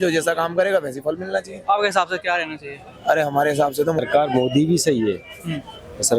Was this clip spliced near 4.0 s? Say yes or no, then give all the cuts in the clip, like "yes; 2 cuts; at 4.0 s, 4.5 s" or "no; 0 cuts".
yes; 1 cut; at 4.0 s